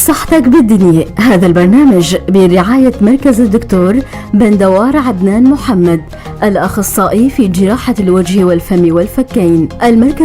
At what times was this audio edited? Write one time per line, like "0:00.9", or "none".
0:01.6